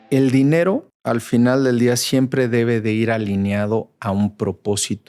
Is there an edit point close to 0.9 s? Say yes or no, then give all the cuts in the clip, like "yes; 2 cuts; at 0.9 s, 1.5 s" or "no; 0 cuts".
yes; 1 cut; at 0.9 s